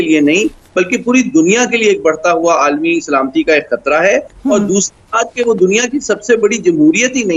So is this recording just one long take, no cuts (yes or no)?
yes